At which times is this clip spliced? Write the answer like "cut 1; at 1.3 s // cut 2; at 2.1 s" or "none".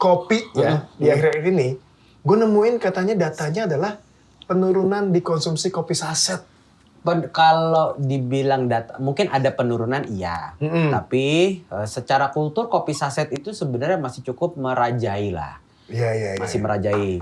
none